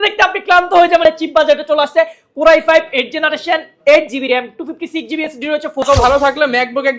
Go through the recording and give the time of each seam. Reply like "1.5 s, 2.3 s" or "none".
1.1 s, 5.8 s

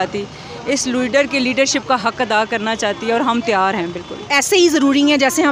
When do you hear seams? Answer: 4.2 s

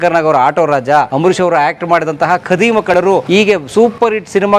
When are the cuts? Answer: 3.0 s

